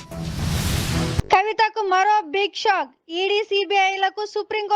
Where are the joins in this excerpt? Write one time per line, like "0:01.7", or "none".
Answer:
0:01.0